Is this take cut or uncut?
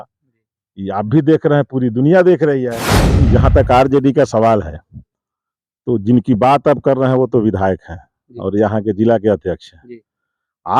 cut